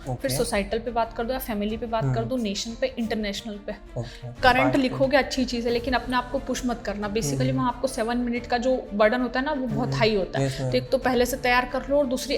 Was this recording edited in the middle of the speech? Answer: yes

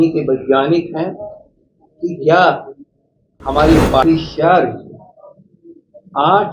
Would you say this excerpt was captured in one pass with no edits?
no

